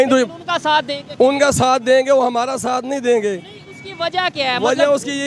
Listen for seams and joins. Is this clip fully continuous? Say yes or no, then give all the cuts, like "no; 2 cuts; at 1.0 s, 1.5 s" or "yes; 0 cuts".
yes; 0 cuts